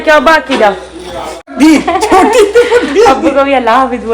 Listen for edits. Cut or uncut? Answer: cut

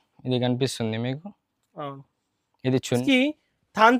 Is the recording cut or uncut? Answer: cut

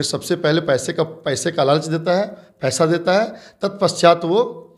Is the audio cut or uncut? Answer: uncut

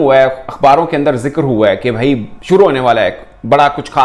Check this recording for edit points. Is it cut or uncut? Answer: uncut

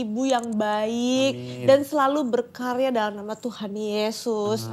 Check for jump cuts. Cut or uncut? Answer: uncut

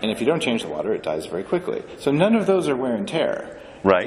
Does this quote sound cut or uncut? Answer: uncut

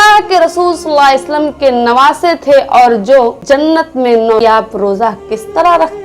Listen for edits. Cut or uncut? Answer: cut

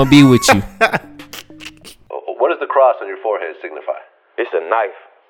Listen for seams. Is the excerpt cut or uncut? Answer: cut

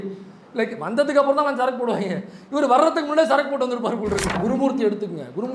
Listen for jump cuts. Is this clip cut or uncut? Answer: cut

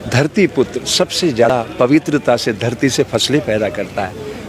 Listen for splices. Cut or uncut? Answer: cut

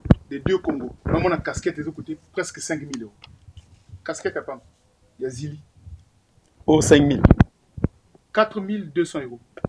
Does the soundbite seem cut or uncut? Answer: cut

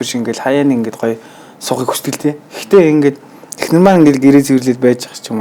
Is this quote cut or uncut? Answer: uncut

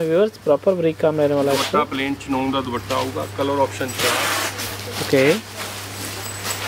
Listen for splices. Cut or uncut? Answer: uncut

